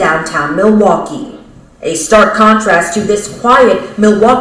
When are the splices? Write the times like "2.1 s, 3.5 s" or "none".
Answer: none